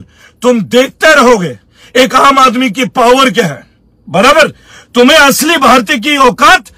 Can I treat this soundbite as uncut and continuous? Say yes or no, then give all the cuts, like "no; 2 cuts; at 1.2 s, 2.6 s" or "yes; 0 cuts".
yes; 0 cuts